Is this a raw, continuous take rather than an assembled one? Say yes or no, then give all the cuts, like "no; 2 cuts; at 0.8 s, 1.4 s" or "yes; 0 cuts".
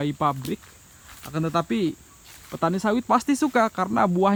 yes; 0 cuts